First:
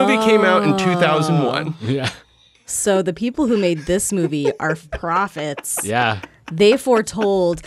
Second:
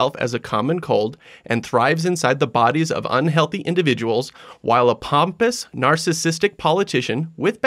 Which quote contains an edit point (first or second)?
first